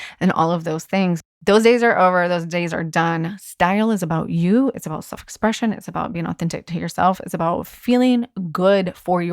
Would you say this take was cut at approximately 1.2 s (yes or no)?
yes